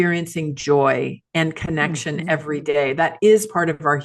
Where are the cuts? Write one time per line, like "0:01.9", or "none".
none